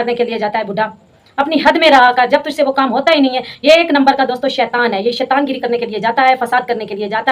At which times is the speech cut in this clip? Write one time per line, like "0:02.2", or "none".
none